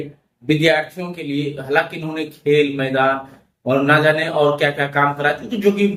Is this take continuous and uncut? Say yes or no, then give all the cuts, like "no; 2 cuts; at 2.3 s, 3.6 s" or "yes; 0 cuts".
yes; 0 cuts